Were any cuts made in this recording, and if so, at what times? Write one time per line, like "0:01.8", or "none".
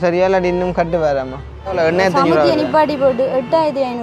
0:01.7